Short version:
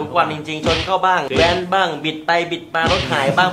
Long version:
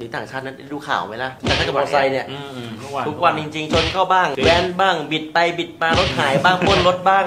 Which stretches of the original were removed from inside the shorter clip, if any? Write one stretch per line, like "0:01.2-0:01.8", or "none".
none